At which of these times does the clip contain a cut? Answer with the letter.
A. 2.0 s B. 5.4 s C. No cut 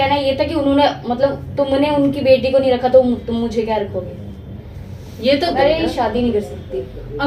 B